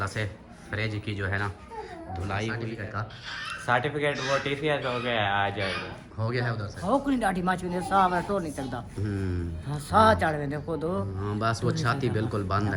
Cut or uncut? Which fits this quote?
cut